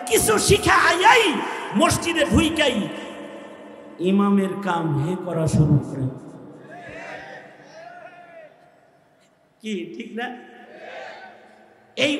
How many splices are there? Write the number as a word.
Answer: zero